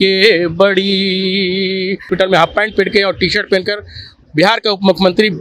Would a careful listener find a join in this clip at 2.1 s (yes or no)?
yes